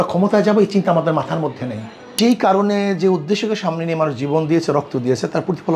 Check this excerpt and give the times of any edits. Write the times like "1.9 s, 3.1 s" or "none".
2.1 s